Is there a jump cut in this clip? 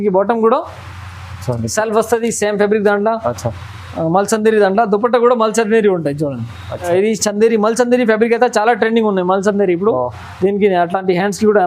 yes; 1 cut; at 6.9 s

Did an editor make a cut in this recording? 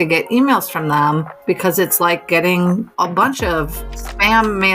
yes; 1 cut; at 2.9 s

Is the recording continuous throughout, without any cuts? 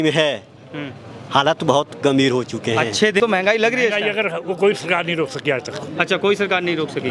no; 1 cut; at 3.2 s

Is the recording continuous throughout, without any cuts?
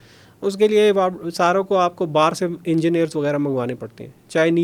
yes; 0 cuts

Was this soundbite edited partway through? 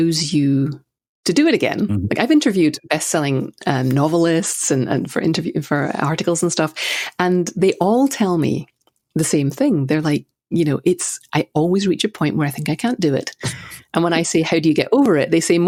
no; 0 cuts

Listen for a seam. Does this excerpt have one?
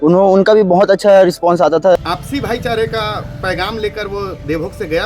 yes; 1 cut; at 2.0 s

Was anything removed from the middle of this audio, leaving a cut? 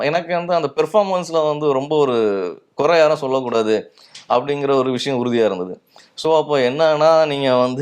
no; 0 cuts

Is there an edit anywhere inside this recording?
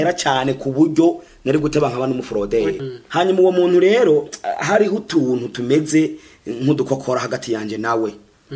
yes; 1 cut; at 2.8 s

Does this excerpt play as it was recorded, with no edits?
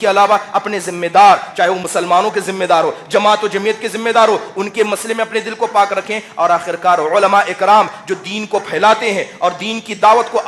yes; 0 cuts

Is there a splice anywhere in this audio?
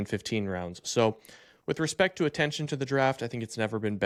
no; 0 cuts

